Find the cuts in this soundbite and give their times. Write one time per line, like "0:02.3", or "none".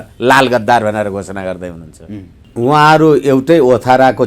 0:02.4